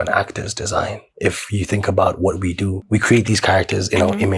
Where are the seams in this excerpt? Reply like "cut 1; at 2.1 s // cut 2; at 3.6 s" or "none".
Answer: cut 1; at 2.8 s